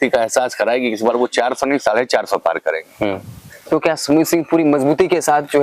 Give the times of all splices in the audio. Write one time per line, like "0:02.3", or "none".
none